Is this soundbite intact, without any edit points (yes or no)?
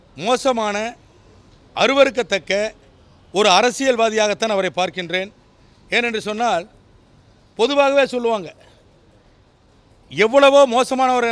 yes